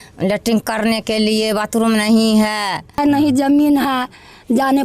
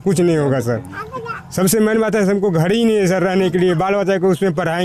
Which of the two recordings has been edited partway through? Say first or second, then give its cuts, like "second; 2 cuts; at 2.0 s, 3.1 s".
first; 1 cut; at 3.0 s